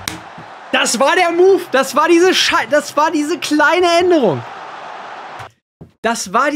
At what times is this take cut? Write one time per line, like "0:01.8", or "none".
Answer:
none